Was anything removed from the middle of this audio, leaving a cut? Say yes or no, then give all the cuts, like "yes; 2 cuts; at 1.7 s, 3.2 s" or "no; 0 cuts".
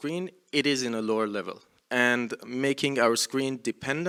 no; 0 cuts